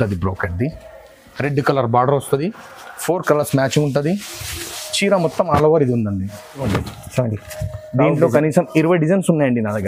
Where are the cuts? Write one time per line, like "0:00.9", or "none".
0:06.6